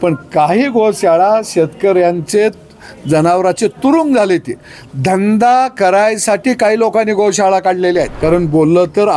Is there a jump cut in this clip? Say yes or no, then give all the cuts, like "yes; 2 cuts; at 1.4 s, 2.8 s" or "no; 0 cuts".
yes; 1 cut; at 8.1 s